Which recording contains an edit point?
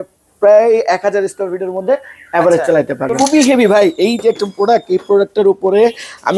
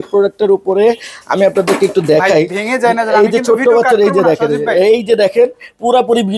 first; 1 cut; at 3.1 s

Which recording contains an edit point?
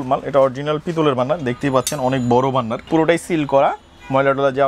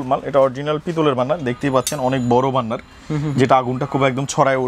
first; 1 cut; at 2.8 s

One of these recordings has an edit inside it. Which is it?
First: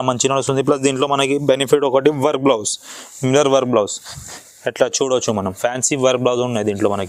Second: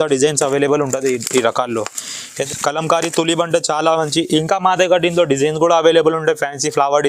second; 1 cut; at 2.4 s

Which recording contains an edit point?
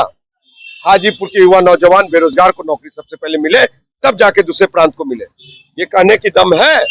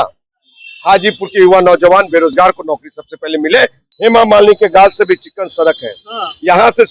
second; 1 cut; at 3.8 s

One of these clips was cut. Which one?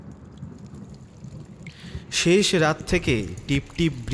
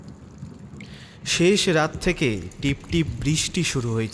second; 1 cut; at 1.3 s

